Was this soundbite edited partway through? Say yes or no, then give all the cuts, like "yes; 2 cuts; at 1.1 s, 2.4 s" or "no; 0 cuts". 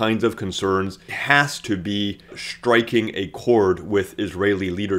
yes; 2 cuts; at 1.1 s, 2.4 s